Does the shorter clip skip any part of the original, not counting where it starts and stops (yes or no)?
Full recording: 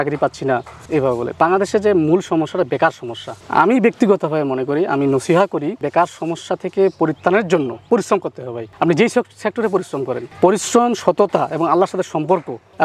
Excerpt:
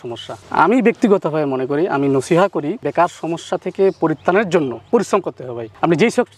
no